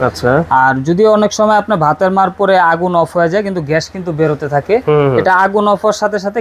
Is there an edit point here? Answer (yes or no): no